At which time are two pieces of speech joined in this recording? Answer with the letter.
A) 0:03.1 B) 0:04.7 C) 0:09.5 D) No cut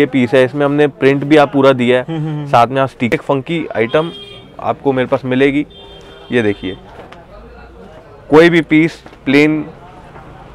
A